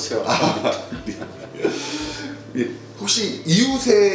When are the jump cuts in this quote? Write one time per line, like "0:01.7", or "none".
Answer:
none